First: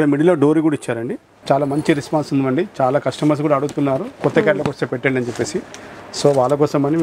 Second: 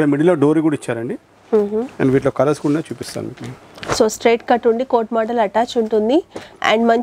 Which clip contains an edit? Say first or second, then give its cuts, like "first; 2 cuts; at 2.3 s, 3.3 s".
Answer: first; 1 cut; at 1.4 s